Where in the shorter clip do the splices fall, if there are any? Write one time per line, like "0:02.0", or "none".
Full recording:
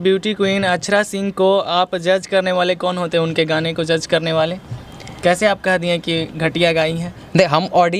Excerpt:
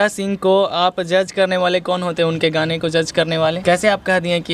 0:03.6